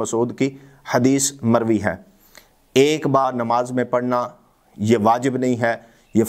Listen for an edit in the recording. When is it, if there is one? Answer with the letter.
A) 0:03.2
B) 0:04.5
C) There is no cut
A